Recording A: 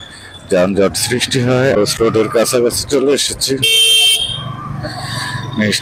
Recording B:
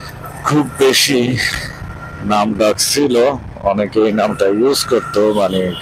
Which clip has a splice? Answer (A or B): A